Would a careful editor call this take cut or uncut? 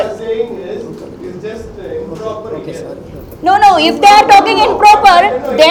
uncut